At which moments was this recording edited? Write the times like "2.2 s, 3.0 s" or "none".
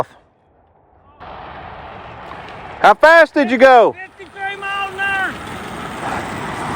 1.2 s